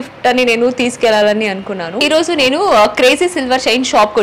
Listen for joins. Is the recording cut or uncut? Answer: cut